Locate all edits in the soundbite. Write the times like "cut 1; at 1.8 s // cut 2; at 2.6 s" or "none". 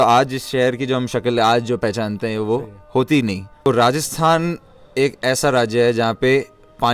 cut 1; at 3.7 s